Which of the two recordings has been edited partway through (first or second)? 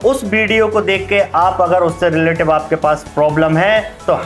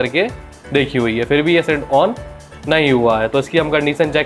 first